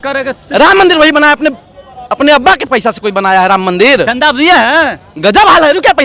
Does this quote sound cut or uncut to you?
uncut